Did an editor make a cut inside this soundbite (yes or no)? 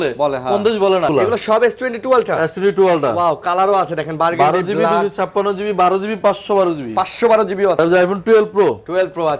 yes